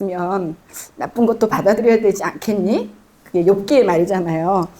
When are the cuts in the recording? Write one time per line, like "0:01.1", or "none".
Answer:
none